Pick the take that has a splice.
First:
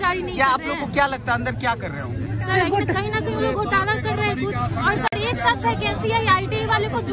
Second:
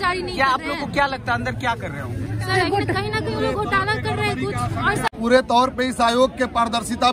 second; 1 cut; at 5.2 s

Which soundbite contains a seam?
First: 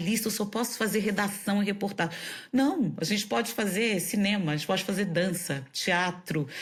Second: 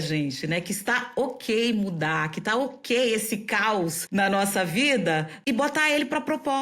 second; 2 cuts; at 4.0 s, 5.3 s

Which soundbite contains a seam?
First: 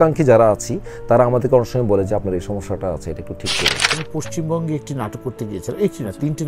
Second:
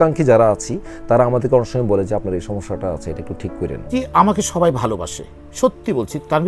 first; 1 cut; at 3.9 s

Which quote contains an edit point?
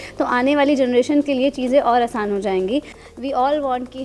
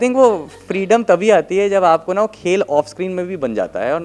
first; 1 cut; at 3.0 s

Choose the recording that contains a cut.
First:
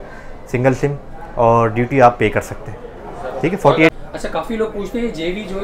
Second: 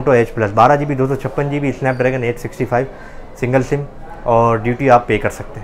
first; 1 cut; at 3.9 s

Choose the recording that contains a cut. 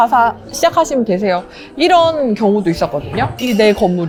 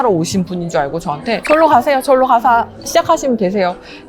second; 1 cut; at 1.4 s

